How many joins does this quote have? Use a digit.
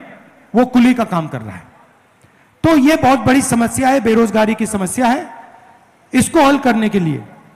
0